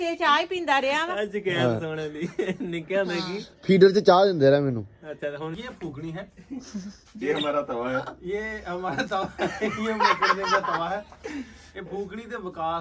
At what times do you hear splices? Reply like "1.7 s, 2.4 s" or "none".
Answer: 5.5 s